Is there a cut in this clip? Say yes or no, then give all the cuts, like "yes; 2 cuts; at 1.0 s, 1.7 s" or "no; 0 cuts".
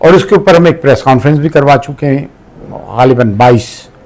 no; 0 cuts